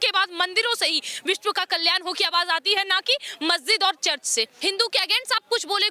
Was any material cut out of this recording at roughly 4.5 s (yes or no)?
yes